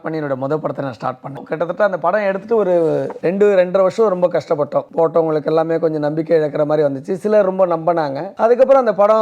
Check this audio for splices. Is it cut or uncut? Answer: cut